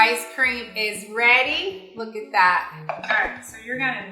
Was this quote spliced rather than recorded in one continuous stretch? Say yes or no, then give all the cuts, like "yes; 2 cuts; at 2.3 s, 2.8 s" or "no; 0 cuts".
yes; 1 cut; at 2.7 s